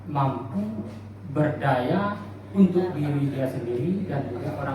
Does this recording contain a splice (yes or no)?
no